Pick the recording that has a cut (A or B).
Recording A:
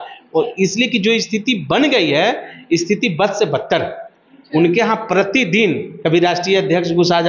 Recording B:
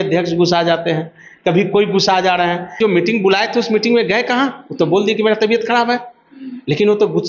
B